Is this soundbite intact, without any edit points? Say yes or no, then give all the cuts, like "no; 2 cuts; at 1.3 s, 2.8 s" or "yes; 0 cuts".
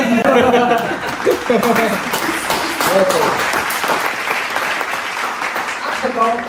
yes; 0 cuts